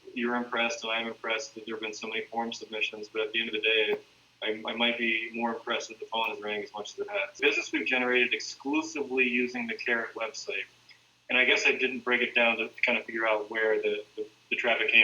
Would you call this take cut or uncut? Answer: cut